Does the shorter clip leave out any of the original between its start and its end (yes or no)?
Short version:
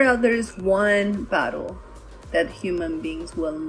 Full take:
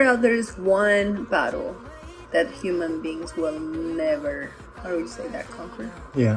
no